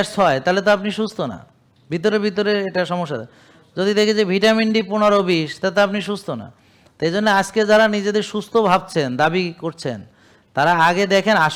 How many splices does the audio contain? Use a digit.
0